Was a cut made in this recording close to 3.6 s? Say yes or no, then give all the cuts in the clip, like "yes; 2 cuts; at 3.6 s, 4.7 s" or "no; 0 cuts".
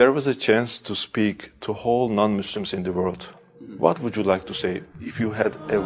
yes; 1 cut; at 3.6 s